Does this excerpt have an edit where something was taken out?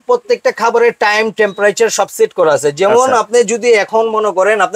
no; 0 cuts

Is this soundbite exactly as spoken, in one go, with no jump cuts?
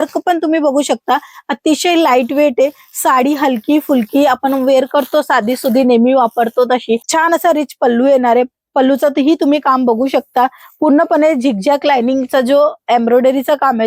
no; 1 cut; at 7.1 s

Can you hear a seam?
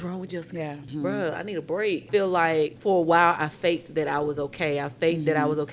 yes; 3 cuts; at 0.9 s, 2.1 s, 2.8 s

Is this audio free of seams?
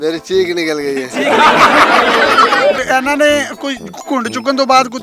no; 1 cut; at 2.8 s

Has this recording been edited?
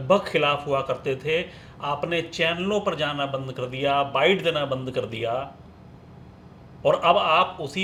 no; 0 cuts

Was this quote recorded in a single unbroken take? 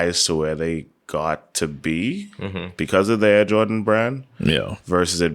no; 1 cut; at 0.9 s

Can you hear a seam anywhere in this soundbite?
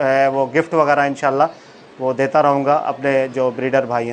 no; 0 cuts

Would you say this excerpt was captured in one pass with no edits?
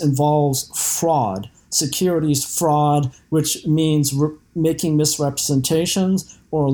yes; 0 cuts

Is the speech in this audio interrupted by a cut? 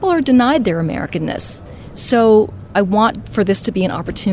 yes; 1 cut; at 2.7 s

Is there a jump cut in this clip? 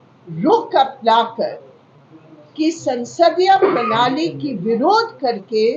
no; 0 cuts

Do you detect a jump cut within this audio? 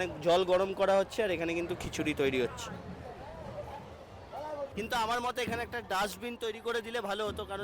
yes; 1 cut; at 4.7 s

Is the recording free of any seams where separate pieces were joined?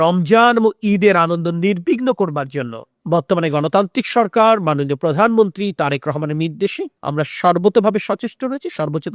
yes; 0 cuts

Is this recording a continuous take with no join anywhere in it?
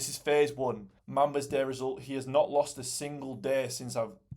no; 1 cut; at 0.9 s

